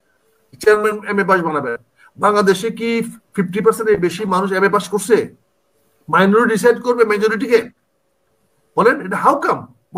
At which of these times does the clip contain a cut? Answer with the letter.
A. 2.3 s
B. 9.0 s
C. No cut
C